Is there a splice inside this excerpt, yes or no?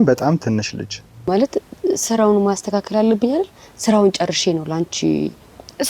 yes